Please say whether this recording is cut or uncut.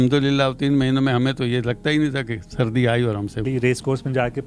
cut